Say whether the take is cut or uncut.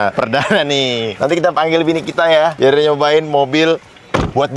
cut